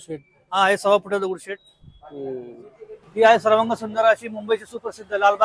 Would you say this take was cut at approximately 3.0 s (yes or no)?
yes